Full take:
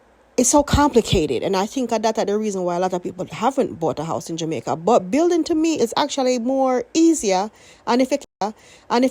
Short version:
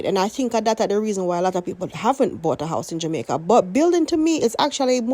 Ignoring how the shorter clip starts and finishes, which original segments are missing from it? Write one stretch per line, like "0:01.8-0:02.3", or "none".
none